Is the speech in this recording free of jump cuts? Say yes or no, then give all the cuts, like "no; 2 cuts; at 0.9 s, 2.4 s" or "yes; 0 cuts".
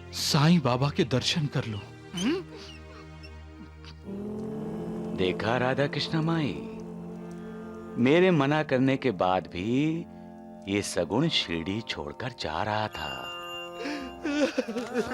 yes; 0 cuts